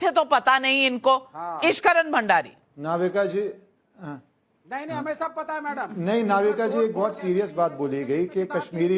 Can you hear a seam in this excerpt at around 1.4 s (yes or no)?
yes